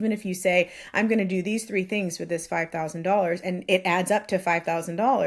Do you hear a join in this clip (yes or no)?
no